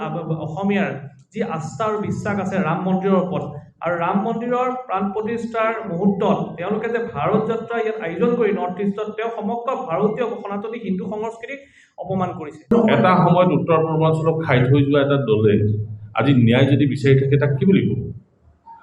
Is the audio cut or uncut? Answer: cut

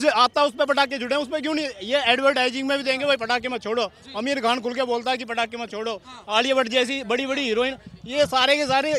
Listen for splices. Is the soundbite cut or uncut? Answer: uncut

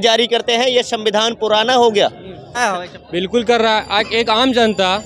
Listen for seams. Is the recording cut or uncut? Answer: cut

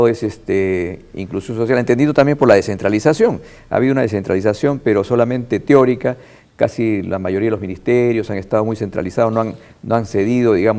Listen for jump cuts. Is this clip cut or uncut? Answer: cut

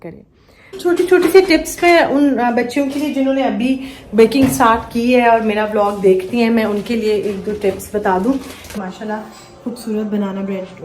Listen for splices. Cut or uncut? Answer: cut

